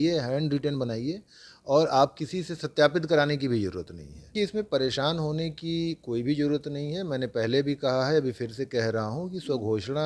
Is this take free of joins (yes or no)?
no